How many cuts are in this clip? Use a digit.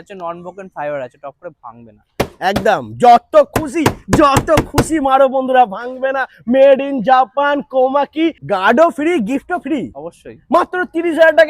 1